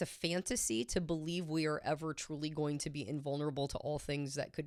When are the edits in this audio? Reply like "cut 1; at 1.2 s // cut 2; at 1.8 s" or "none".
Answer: none